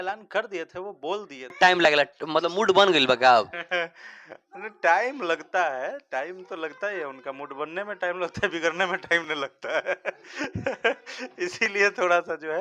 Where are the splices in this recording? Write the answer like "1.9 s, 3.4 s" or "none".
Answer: 1.5 s